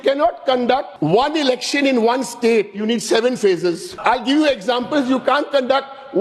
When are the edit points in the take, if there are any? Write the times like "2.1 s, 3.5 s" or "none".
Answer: 0.9 s, 3.9 s